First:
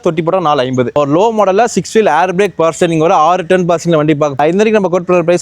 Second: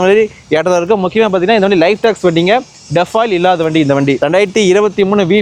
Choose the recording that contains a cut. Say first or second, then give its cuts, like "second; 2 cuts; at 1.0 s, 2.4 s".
first; 2 cuts; at 0.9 s, 4.4 s